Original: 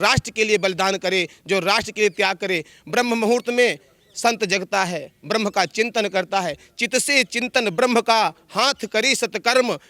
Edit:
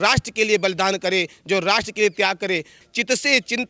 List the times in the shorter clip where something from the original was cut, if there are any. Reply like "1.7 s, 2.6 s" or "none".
2.8 s